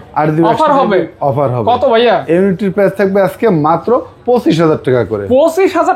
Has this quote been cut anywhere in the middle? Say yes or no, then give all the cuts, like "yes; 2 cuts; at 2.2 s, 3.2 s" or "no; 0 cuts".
no; 0 cuts